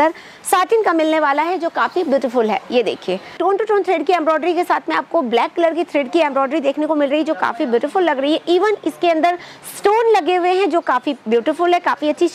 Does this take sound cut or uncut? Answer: cut